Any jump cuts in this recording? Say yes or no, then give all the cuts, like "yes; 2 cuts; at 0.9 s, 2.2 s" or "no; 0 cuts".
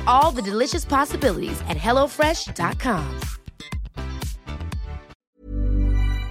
yes; 1 cut; at 5.1 s